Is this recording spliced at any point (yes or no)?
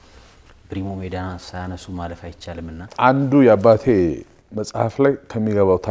yes